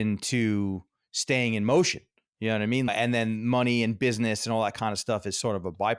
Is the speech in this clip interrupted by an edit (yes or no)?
yes